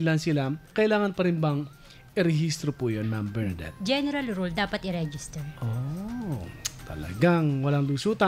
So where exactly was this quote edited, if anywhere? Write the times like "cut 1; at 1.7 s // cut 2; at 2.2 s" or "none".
none